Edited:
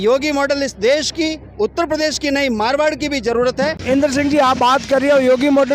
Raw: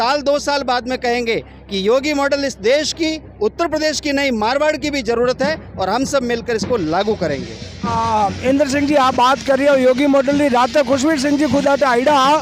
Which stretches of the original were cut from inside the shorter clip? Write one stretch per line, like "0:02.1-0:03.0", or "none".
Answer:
0:05.6-0:08.4